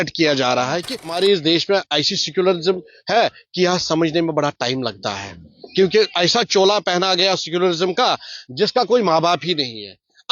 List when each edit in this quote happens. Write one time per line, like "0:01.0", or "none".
0:01.0